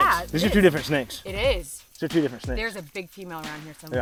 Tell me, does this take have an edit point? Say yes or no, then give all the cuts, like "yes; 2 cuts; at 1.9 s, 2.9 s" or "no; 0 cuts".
no; 0 cuts